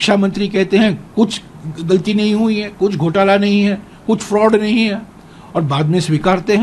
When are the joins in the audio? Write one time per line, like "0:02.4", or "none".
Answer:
none